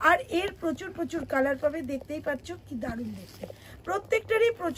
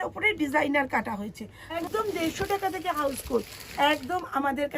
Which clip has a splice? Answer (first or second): second